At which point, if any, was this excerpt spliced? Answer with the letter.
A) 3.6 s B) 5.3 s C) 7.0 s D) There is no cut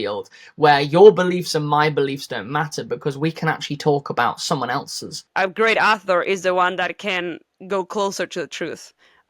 B